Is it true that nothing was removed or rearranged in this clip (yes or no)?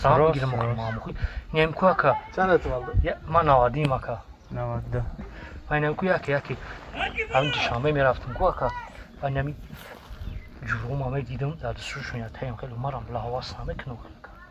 yes